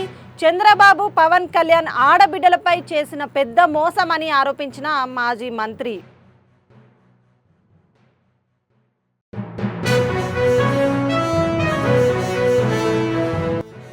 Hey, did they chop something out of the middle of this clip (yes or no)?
no